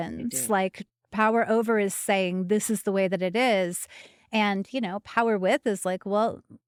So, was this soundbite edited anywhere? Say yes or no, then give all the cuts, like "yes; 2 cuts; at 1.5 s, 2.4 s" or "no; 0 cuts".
no; 0 cuts